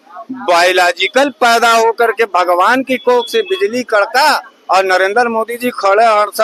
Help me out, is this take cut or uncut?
uncut